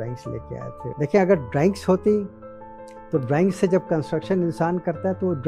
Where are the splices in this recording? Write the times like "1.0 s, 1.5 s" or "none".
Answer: 0.9 s